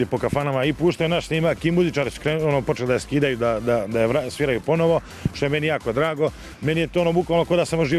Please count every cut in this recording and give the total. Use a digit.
0